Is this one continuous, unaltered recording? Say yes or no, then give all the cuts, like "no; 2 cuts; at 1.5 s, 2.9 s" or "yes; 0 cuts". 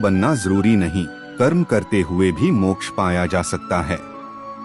yes; 0 cuts